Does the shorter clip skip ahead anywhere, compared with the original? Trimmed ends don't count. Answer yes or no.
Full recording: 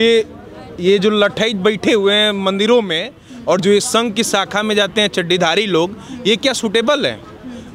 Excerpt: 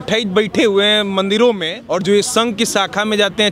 yes